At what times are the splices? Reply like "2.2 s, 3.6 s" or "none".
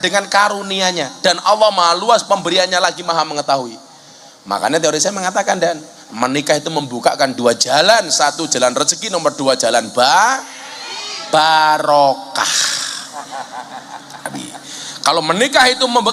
none